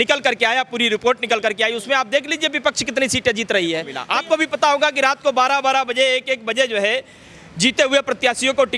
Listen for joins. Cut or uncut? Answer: cut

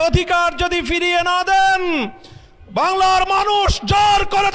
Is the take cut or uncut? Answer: uncut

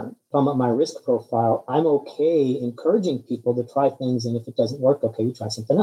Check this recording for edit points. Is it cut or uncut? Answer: uncut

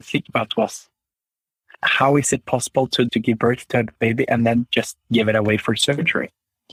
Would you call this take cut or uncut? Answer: uncut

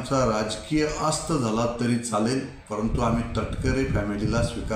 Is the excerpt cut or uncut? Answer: uncut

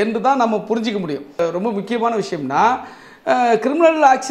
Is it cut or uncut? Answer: cut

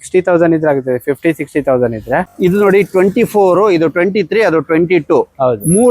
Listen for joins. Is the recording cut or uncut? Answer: cut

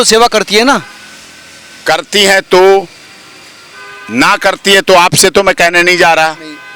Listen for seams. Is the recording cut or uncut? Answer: uncut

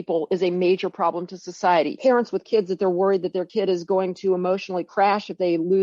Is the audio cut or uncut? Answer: cut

